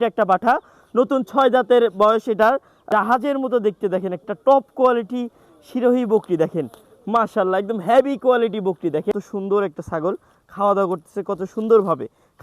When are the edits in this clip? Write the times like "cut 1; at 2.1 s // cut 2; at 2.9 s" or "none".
cut 1; at 2.8 s // cut 2; at 9.1 s